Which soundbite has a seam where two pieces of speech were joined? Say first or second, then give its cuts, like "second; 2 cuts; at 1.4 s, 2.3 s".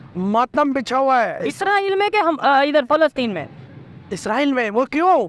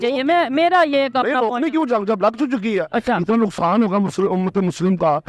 first; 1 cut; at 1.1 s